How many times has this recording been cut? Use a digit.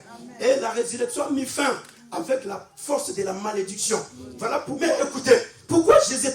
1